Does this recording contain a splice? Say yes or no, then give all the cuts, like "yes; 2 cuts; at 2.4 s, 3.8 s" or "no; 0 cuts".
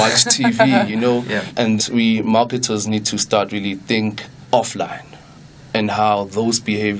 yes; 1 cut; at 1.7 s